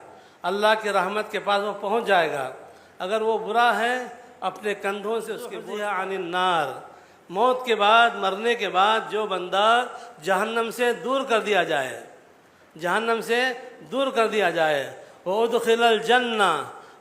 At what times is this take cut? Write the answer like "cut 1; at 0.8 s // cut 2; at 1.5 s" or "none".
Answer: cut 1; at 5.6 s